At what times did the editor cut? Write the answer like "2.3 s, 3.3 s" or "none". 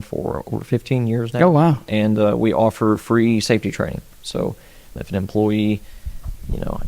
5.0 s